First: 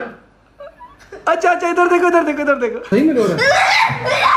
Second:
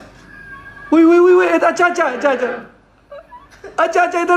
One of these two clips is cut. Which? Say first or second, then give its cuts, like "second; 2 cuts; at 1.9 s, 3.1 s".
first; 1 cut; at 2.8 s